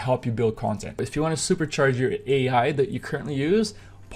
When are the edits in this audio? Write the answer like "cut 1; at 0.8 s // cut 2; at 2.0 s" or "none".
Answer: cut 1; at 0.9 s